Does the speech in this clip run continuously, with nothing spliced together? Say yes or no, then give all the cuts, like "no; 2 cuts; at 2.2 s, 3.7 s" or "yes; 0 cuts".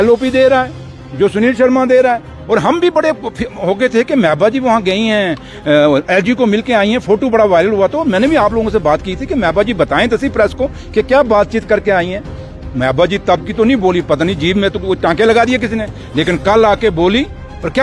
yes; 0 cuts